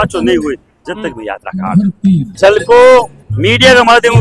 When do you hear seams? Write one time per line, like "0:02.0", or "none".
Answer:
0:02.3